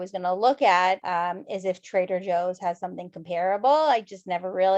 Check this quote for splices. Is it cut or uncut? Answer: cut